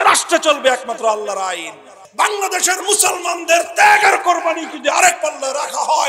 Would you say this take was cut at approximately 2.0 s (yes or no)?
yes